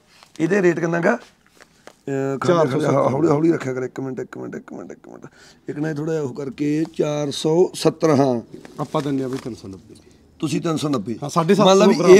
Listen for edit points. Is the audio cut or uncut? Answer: uncut